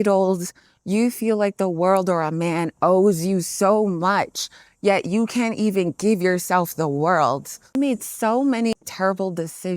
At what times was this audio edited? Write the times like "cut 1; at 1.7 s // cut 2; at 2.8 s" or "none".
cut 1; at 7.7 s // cut 2; at 8.7 s

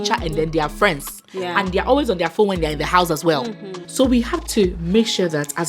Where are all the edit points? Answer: cut 1; at 3.9 s

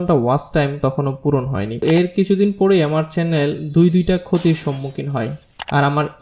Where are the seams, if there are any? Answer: cut 1; at 1.8 s

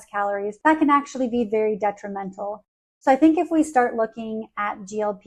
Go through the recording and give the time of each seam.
none

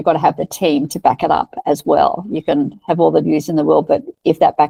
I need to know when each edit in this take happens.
none

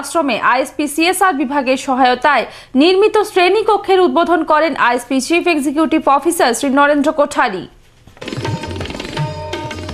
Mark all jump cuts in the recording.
none

